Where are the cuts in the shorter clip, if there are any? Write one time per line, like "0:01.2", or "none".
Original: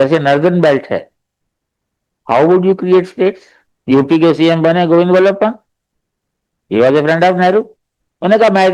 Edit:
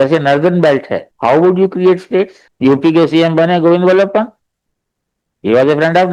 0:01.0
0:02.4